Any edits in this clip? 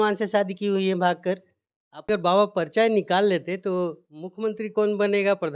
yes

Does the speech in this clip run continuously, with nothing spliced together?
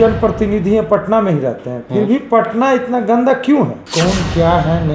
no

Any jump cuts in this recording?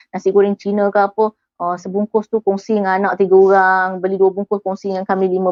no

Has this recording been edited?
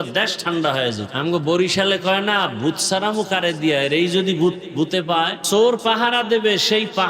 yes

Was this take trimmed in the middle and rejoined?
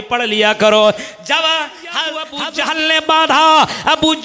yes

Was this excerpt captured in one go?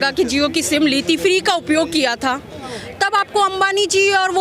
no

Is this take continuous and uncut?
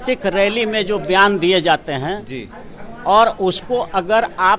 yes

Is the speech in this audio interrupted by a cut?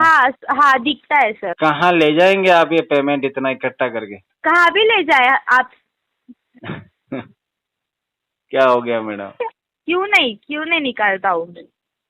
yes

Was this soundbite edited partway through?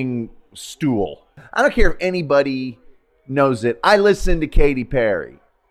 yes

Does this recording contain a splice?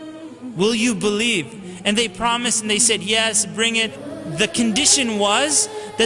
yes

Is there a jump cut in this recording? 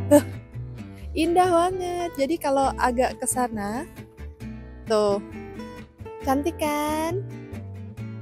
no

